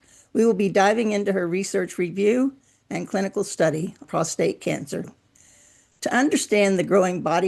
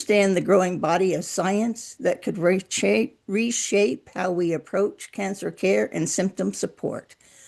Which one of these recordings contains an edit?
first; 1 cut; at 4.0 s

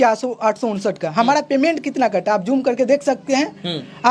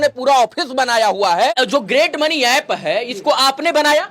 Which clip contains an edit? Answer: second; 1 cut; at 1.5 s

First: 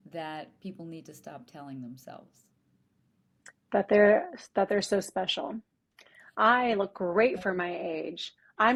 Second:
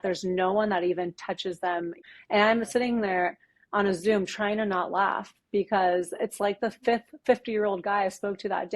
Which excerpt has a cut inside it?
second; 1 cut; at 2.0 s

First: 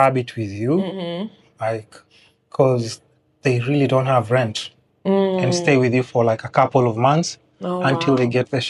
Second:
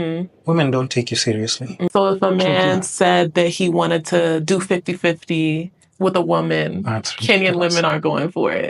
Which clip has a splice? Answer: second; 1 cut; at 1.9 s

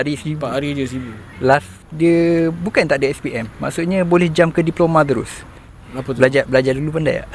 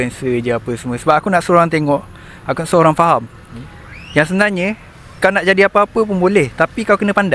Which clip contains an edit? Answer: first; 2 cuts; at 1.8 s, 5.7 s

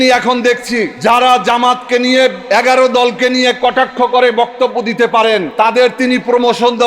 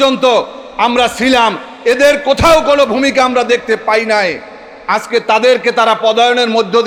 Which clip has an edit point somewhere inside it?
first; 3 cuts; at 0.9 s, 2.4 s, 5.5 s

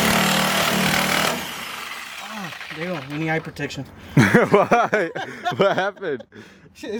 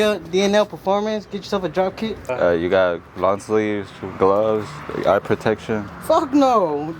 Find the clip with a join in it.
second; 1 cut; at 2.3 s

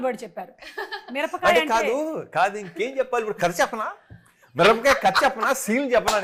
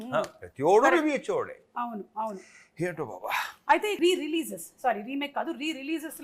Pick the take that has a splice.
second; 1 cut; at 3.9 s

